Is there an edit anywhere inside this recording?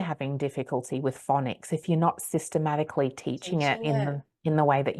no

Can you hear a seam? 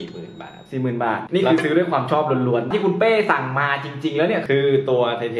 yes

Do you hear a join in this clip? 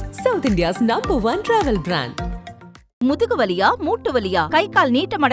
no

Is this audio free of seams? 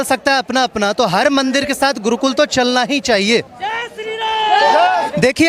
yes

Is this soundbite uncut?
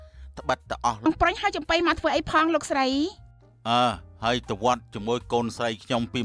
no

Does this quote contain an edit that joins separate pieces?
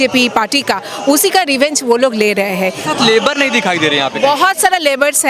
yes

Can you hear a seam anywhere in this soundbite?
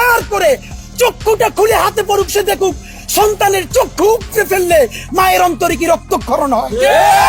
no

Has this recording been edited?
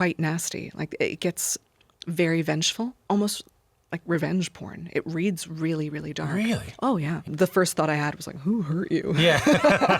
yes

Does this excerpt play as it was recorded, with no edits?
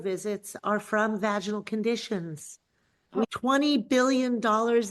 no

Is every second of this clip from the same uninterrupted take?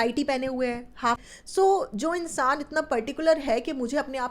no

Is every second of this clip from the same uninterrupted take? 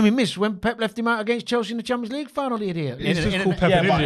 no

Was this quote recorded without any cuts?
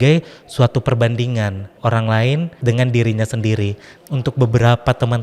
no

